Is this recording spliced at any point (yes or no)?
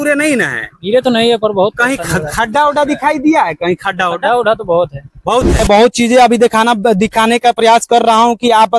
yes